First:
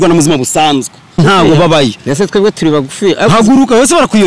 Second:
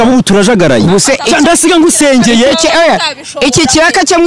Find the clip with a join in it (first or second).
first